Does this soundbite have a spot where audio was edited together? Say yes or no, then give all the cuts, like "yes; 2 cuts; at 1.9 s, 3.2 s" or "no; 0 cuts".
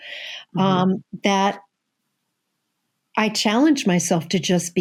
no; 0 cuts